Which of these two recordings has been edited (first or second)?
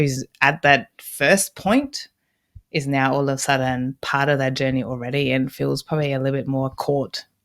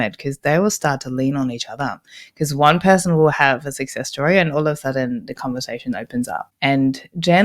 second